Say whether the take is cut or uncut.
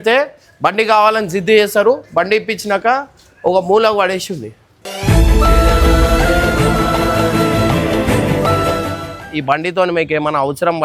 cut